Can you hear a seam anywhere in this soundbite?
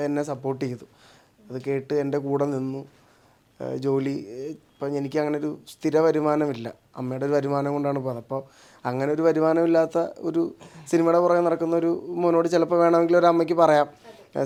no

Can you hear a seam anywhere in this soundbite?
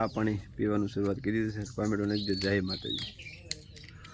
no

